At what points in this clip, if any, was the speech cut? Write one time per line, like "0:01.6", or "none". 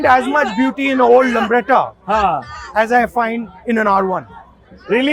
none